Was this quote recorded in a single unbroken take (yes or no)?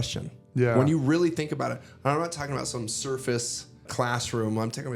no